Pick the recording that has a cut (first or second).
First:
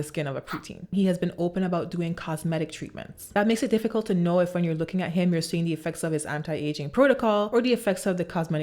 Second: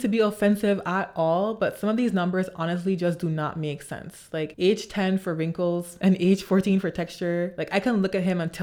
first